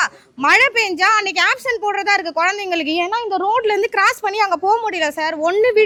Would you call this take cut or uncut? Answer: uncut